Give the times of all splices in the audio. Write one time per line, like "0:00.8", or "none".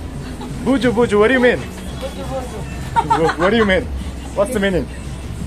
none